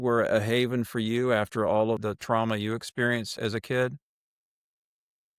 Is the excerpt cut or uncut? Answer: cut